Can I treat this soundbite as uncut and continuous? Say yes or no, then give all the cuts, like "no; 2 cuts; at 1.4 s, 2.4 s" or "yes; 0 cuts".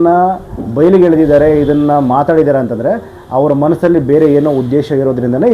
yes; 0 cuts